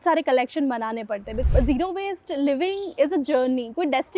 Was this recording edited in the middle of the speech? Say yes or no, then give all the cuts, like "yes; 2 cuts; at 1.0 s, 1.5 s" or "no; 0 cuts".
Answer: yes; 1 cut; at 1.4 s